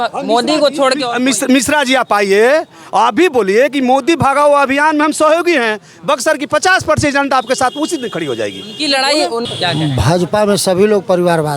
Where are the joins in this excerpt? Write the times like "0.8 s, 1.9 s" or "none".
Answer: 9.5 s